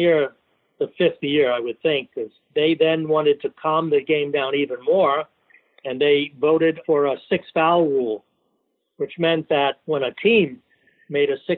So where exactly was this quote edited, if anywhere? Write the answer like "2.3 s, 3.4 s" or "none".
2.4 s, 6.8 s, 9.8 s